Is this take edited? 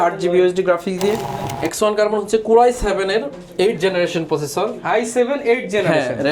yes; 1 cut; at 1.5 s

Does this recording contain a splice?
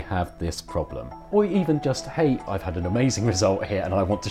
yes; 2 cuts; at 1.1 s, 2.4 s

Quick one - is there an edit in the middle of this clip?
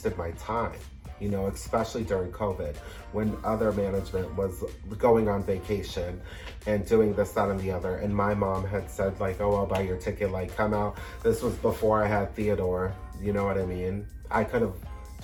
no; 0 cuts

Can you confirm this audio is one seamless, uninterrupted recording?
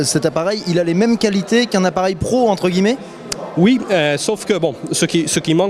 no; 1 cut; at 1.7 s

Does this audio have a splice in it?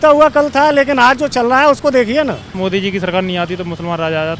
yes; 1 cut; at 2.5 s

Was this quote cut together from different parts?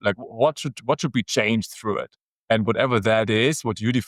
no; 0 cuts

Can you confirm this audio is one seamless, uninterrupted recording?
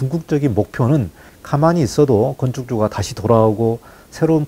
yes; 0 cuts

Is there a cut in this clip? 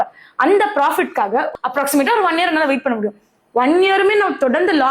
yes; 1 cut; at 1.5 s

